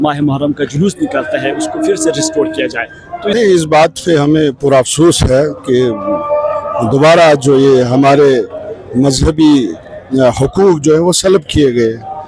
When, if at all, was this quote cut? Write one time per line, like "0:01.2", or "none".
0:03.3